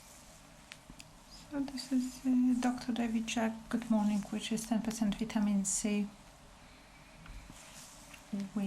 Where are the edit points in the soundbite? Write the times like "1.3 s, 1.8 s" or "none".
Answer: 0.9 s, 7.5 s